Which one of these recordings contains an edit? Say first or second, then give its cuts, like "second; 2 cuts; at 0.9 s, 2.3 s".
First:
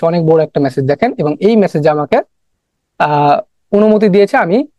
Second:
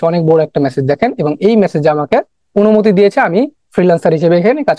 second; 1 cut; at 2.4 s